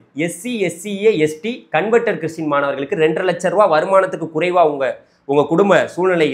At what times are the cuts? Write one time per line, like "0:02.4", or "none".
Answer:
none

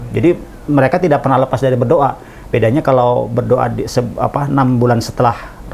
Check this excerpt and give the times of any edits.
none

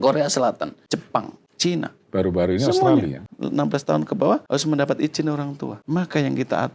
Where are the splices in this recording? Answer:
0:01.1
0:03.3
0:04.4
0:05.7

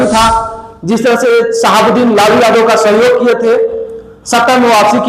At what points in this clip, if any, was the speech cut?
none

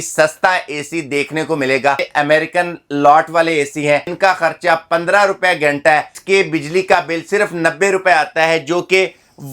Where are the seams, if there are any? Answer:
0:02.1
0:04.1
0:06.2

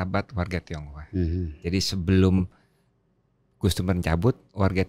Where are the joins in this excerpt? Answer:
none

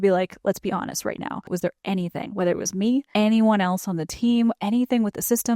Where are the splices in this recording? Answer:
0:01.5
0:03.1

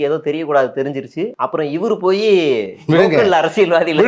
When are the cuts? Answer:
0:01.4

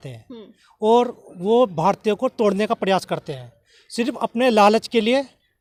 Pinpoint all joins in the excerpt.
none

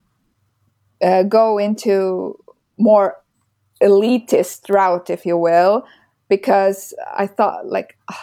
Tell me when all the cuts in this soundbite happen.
none

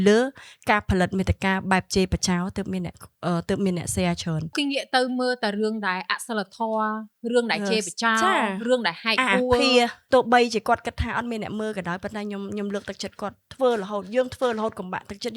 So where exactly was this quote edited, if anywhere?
0:04.5
0:10.0

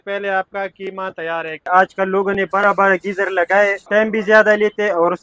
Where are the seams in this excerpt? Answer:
0:01.7
0:03.8

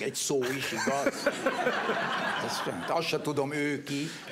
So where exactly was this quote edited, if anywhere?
none

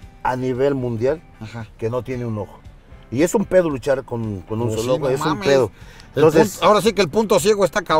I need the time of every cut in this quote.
none

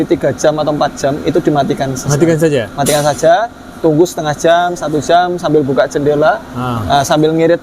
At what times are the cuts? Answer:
none

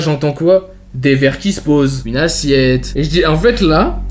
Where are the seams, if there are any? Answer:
0:02.0

